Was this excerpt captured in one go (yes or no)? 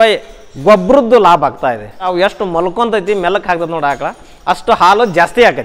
no